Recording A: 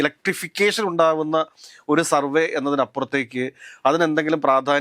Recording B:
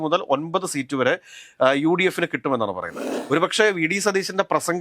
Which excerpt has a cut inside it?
B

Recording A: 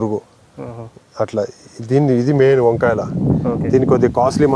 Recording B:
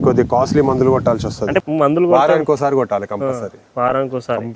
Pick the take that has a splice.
B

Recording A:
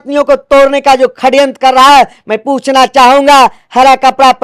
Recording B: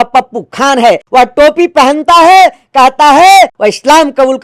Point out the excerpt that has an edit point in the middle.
B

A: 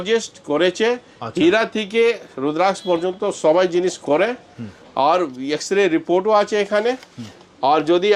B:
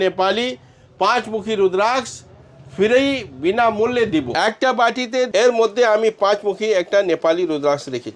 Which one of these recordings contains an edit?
B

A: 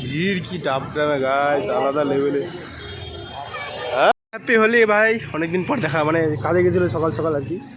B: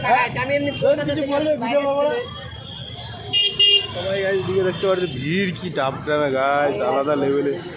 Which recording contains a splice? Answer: A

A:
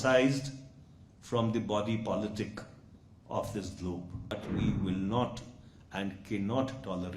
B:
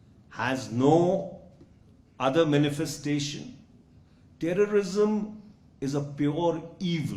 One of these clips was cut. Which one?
A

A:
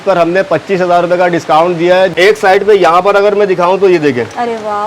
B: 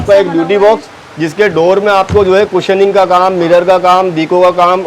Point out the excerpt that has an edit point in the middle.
A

